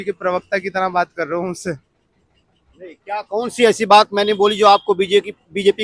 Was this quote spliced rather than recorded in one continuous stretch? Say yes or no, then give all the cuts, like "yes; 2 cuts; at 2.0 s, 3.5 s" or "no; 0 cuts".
no; 0 cuts